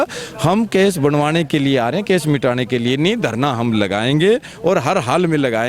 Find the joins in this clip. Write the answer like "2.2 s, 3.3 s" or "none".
none